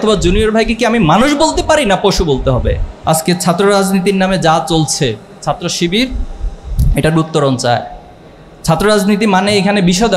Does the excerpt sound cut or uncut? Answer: cut